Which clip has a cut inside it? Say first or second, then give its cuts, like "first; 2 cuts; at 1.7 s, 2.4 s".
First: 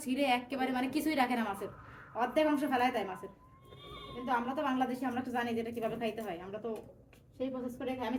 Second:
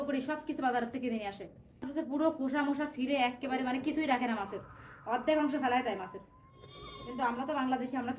second; 1 cut; at 1.9 s